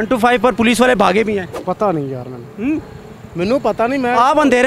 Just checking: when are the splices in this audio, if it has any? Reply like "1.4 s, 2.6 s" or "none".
1.6 s